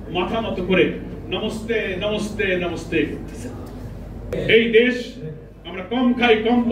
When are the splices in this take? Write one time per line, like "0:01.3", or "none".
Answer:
0:04.3